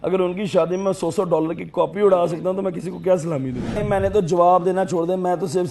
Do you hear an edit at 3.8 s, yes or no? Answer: yes